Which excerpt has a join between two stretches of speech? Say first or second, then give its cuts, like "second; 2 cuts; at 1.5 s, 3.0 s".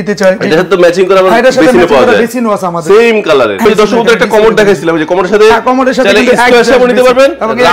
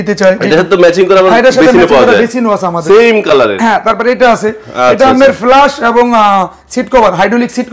first; 1 cut; at 3.3 s